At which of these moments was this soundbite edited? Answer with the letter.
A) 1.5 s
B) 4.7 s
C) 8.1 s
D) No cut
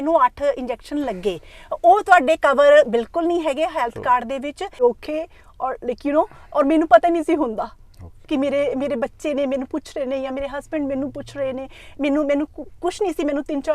B